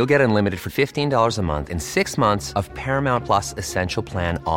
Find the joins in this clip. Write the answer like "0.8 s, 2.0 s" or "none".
none

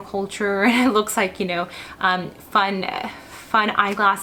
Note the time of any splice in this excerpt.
none

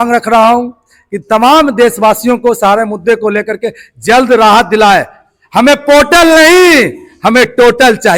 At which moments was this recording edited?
none

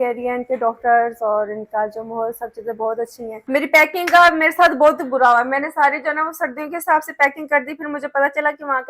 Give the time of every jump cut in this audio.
3.4 s

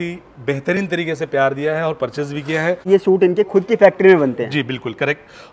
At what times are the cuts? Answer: 2.9 s

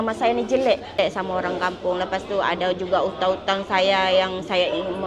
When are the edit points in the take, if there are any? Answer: 1.0 s

